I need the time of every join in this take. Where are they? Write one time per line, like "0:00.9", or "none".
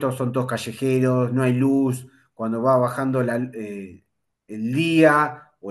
none